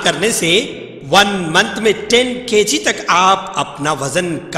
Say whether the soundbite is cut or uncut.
uncut